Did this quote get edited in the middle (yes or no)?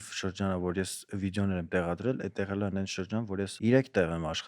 yes